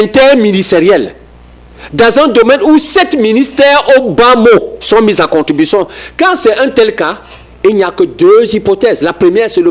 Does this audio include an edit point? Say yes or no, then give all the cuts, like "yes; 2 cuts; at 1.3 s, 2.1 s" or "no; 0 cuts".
no; 0 cuts